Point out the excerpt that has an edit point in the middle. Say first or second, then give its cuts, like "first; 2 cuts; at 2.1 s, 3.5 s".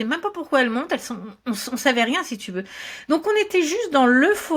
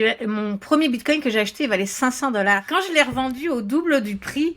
second; 1 cut; at 2.6 s